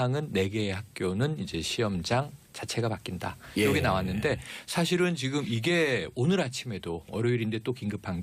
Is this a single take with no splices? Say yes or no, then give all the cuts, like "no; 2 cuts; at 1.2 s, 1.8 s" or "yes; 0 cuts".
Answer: yes; 0 cuts